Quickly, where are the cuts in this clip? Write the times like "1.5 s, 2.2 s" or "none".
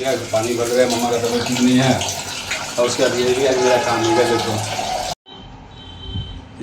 5.1 s